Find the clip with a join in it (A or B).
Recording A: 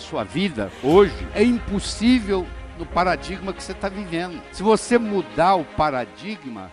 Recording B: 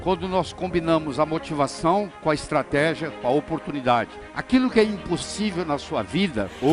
B